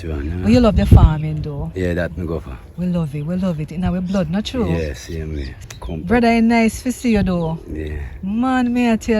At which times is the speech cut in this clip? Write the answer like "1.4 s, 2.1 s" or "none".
5.2 s